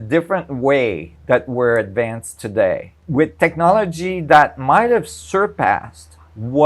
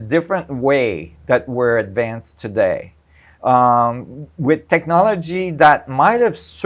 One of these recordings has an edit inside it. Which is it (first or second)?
first